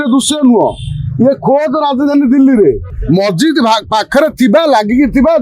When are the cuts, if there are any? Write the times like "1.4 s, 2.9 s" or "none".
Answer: 2.9 s